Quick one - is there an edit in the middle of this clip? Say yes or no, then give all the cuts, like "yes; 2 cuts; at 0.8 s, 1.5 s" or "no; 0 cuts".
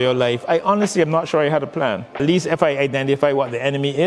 yes; 1 cut; at 2.2 s